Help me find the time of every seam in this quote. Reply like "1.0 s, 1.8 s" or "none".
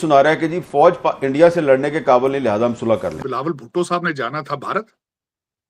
3.2 s